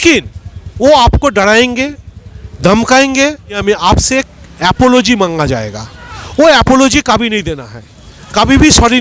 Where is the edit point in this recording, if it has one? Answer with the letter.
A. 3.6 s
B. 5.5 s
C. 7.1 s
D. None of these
A